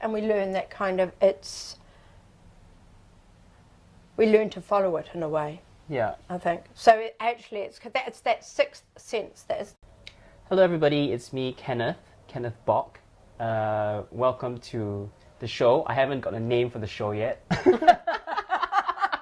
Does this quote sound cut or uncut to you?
uncut